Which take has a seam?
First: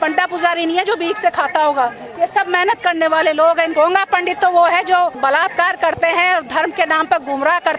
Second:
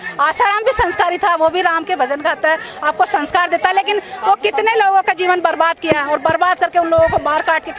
first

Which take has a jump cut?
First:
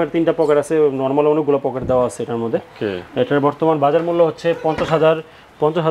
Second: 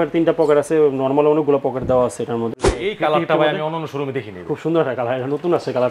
second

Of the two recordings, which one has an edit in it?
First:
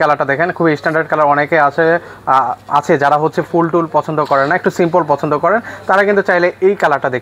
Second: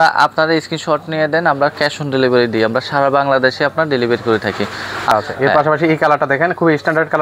second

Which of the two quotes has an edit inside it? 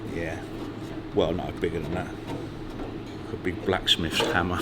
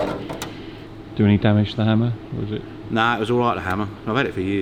first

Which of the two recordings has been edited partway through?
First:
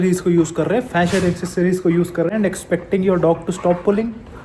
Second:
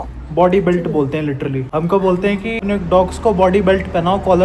second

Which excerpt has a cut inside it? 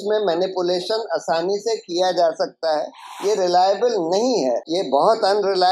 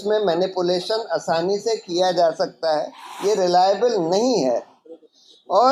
first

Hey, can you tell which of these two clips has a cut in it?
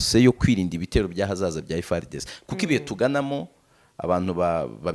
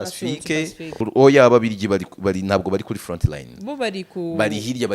second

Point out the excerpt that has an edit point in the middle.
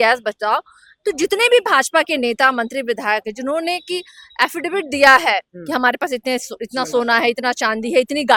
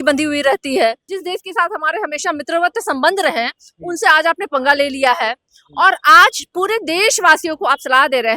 second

